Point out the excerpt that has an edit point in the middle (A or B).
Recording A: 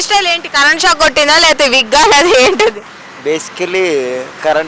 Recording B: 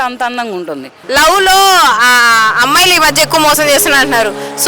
B